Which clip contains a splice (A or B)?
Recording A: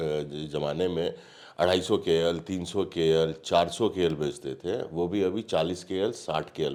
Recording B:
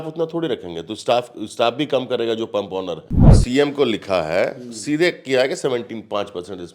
B